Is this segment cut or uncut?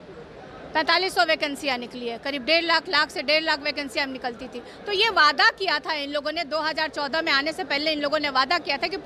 uncut